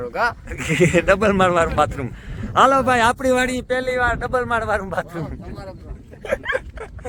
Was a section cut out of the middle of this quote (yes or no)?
no